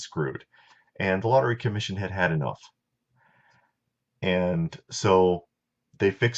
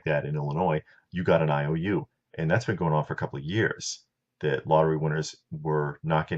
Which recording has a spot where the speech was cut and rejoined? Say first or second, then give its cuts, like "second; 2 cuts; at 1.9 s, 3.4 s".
second; 1 cut; at 5.4 s